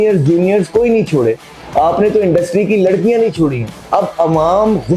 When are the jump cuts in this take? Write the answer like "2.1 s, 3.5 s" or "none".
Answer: 3.8 s